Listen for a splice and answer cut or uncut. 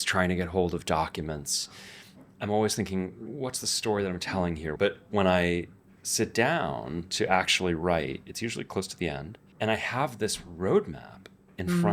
cut